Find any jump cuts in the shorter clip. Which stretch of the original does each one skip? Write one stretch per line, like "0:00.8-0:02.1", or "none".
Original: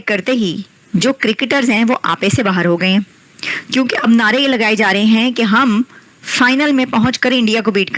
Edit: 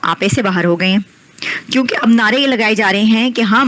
none